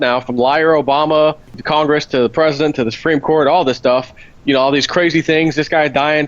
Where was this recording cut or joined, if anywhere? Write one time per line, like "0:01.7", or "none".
0:01.6